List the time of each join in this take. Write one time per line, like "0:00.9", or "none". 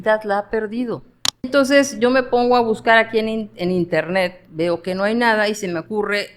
0:01.5